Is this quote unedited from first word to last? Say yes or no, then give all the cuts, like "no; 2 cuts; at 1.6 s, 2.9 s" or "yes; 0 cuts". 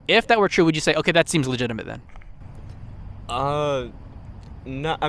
yes; 0 cuts